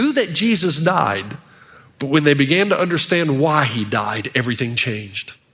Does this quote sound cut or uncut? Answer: uncut